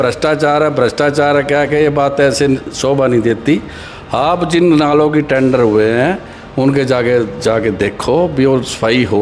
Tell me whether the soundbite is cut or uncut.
uncut